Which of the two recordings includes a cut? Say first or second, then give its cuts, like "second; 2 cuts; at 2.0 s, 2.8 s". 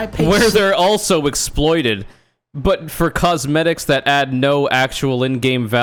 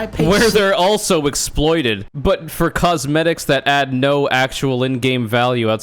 second; 1 cut; at 2.1 s